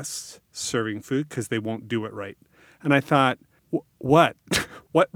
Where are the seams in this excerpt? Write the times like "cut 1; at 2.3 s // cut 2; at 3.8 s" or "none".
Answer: cut 1; at 3.5 s